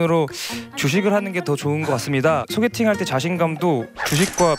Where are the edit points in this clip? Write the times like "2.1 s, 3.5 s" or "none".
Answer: 2.5 s